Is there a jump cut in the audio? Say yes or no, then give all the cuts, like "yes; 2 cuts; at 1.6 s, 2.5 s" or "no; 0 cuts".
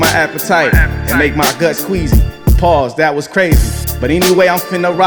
no; 0 cuts